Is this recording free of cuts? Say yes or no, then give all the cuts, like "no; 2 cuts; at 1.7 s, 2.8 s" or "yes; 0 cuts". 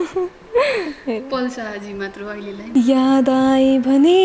no; 1 cut; at 2.6 s